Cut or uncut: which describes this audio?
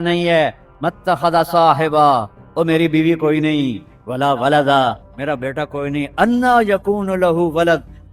uncut